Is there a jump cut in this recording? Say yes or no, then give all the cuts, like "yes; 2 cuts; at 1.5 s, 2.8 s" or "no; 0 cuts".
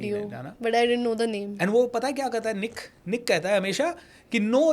no; 0 cuts